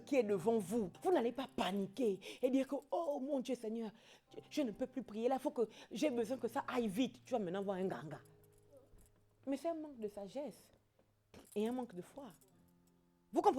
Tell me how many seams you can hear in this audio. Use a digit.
1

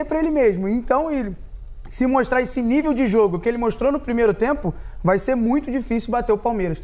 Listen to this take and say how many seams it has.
0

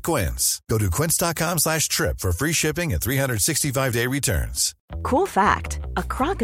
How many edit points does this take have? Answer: 1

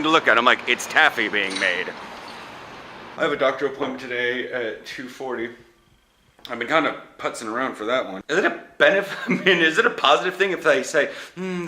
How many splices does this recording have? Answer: 2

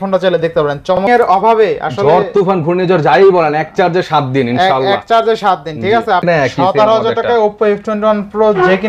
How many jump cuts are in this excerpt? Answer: 2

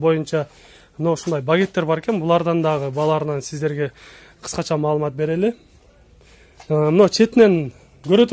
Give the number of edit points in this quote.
0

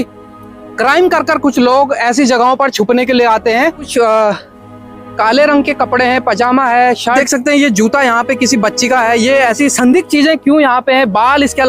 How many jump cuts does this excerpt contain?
2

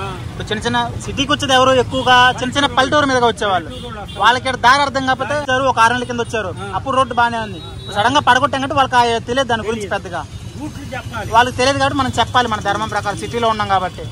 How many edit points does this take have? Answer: 1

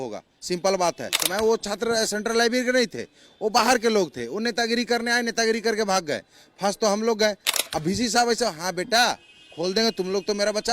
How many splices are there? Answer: 2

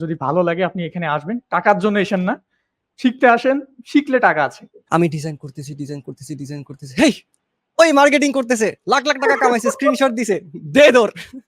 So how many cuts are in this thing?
1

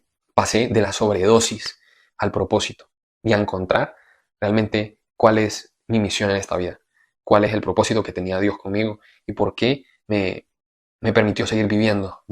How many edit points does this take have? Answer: 0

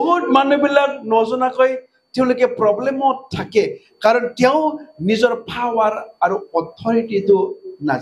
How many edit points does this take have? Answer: 0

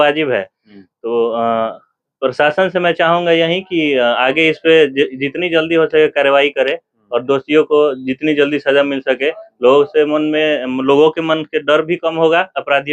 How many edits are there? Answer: 0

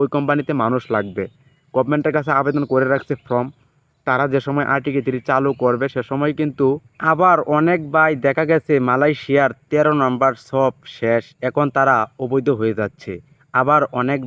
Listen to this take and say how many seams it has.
1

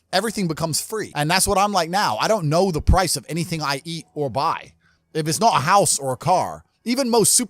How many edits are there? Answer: 1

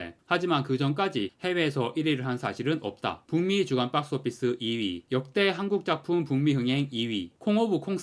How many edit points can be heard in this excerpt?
1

